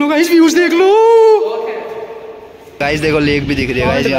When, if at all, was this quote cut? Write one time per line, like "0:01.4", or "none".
0:02.8